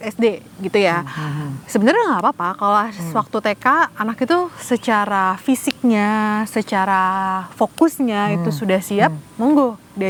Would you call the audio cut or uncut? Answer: uncut